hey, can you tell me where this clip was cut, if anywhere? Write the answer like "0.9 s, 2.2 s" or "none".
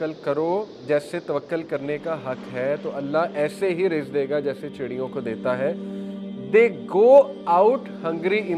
none